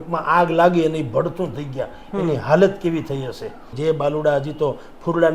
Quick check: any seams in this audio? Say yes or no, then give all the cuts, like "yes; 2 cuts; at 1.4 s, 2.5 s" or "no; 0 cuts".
yes; 1 cut; at 3.8 s